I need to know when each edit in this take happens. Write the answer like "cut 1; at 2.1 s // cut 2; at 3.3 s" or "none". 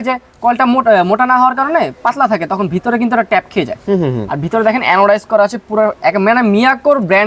none